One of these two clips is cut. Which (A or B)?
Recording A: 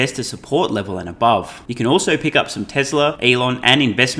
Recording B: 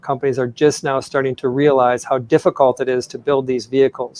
A